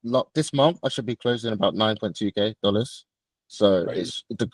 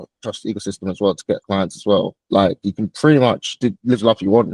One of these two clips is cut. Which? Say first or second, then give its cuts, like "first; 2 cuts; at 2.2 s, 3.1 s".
second; 2 cuts; at 2.2 s, 3.5 s